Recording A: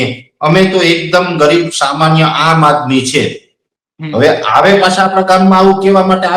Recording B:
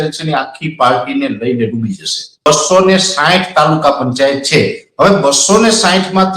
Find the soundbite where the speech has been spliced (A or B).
B